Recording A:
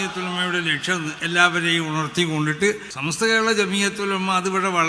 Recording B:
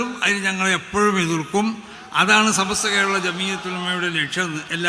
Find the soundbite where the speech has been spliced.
A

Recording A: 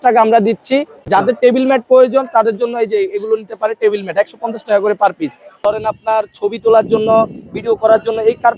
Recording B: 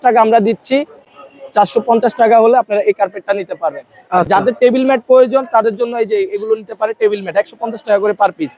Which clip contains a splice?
A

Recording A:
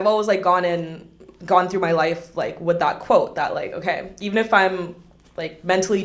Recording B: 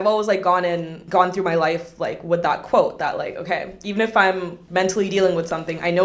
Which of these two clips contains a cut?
B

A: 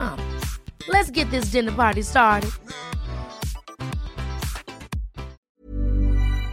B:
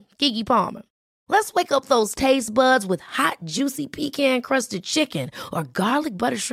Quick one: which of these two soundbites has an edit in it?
A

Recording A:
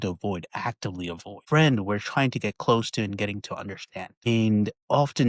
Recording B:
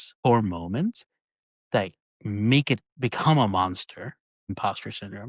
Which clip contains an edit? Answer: A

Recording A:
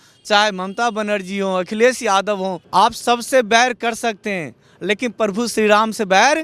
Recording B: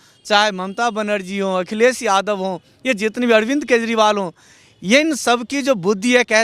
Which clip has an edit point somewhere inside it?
A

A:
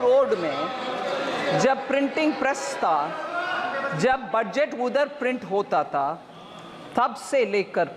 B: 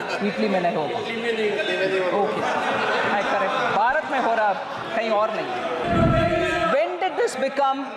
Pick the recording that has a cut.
B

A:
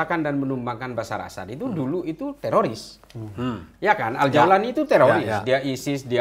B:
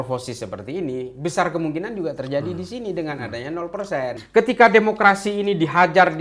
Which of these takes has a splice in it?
B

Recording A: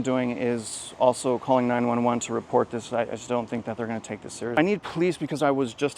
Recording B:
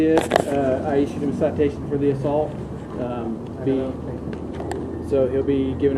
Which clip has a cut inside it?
A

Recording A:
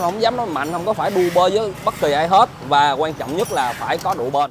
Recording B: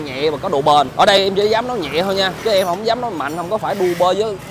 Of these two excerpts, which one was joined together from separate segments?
B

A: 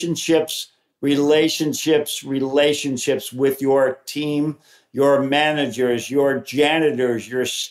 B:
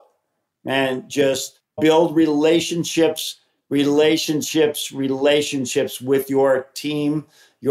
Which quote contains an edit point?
B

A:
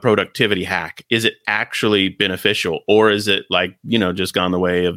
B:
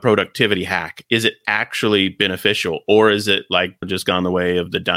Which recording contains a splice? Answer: B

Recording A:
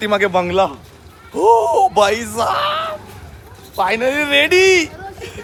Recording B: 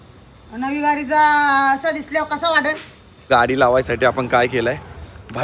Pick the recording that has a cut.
B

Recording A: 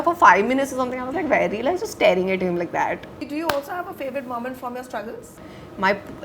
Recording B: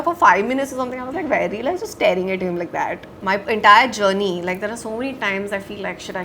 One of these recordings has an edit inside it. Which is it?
B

